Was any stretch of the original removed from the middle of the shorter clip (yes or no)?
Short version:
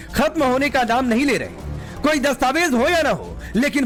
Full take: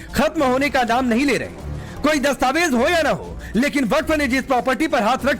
no